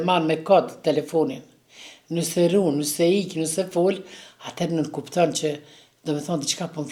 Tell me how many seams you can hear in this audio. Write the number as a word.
zero